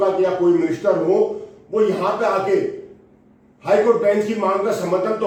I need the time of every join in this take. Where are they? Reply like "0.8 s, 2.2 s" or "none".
none